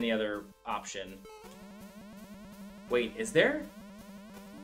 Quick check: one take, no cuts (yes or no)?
yes